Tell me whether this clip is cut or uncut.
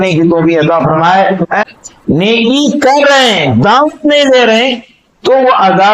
cut